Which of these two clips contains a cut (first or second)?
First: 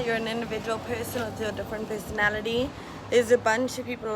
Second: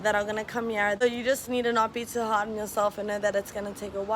second